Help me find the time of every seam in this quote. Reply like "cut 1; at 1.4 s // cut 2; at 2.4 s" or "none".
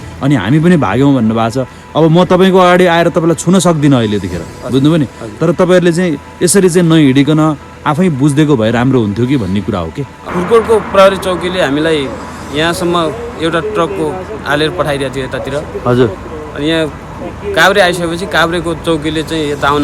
cut 1; at 10.2 s